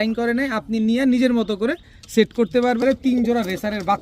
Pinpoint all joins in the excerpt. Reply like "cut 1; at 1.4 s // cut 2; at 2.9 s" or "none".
cut 1; at 2.8 s

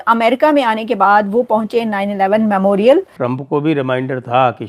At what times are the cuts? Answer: cut 1; at 3.1 s

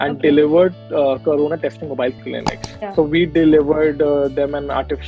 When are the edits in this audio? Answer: cut 1; at 2.2 s

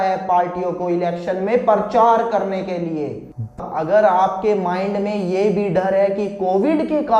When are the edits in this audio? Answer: cut 1; at 3.6 s

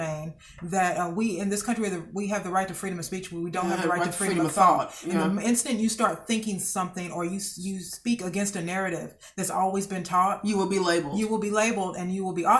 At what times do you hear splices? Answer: none

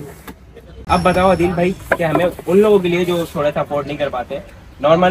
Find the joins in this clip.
cut 1; at 1.0 s

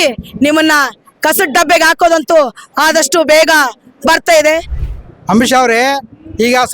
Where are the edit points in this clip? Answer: cut 1; at 4.8 s

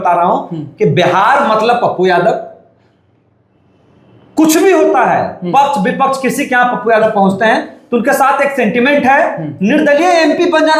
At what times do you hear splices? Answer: none

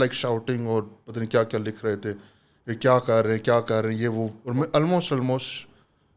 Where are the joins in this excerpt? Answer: cut 1; at 4.4 s

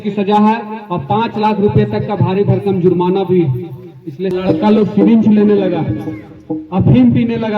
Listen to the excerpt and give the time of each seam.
cut 1; at 4.3 s

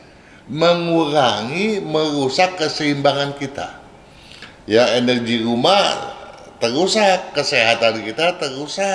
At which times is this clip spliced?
none

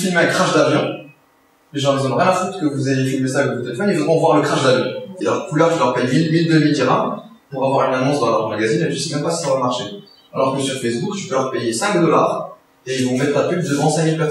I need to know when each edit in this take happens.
cut 1; at 5.1 s

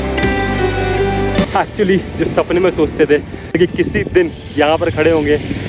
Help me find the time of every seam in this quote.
cut 1; at 1.5 s

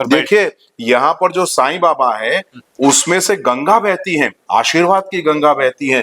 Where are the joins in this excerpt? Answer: none

